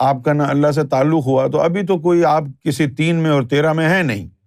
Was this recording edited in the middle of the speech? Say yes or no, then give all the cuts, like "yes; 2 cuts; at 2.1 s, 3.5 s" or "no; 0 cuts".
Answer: no; 0 cuts